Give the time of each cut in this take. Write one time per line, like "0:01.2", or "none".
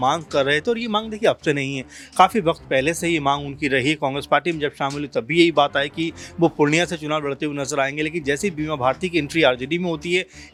none